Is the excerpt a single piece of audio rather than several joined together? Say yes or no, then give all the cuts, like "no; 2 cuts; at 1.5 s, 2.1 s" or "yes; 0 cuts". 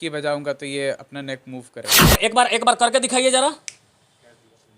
no; 1 cut; at 2.1 s